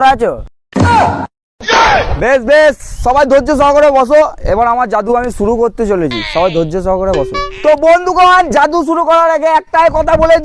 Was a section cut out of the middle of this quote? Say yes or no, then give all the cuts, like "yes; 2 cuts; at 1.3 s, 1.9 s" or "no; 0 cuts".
no; 0 cuts